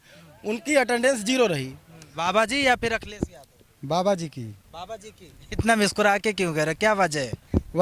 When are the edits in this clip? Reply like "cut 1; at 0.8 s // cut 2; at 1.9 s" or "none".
cut 1; at 2.2 s